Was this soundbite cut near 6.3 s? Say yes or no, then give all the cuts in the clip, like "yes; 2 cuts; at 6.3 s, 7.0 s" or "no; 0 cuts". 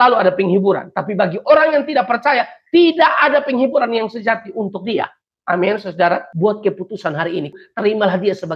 yes; 2 cuts; at 6.3 s, 7.6 s